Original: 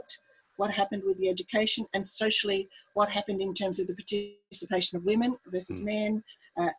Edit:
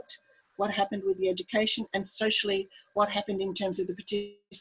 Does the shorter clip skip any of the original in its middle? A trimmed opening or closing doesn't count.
no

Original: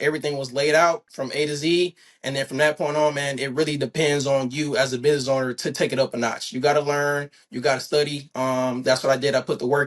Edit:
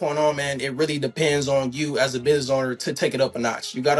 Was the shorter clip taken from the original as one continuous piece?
yes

